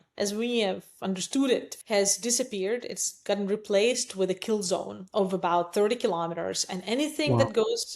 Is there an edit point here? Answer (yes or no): yes